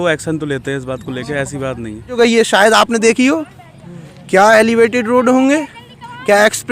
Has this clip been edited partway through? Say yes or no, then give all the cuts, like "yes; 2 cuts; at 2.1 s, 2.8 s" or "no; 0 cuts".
yes; 1 cut; at 2.2 s